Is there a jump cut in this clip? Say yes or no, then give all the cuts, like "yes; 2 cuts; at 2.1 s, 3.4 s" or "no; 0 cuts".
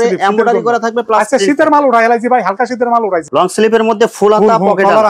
yes; 1 cut; at 3.2 s